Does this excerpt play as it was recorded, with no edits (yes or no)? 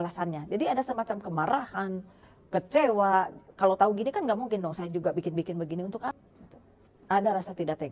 no